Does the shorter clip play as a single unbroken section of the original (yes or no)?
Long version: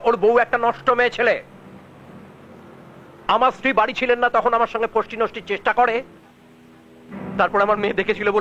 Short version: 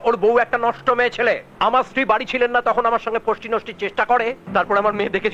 no